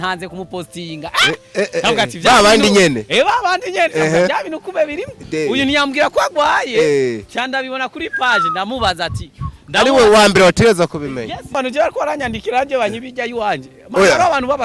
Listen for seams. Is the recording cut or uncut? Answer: cut